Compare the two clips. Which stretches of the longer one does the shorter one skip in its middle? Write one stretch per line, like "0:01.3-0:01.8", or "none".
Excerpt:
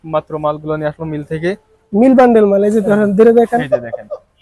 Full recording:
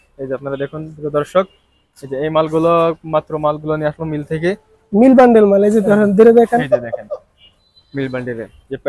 none